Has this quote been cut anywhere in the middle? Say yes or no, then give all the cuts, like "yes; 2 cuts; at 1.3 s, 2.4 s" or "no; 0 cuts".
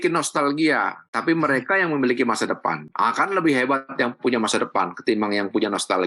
no; 0 cuts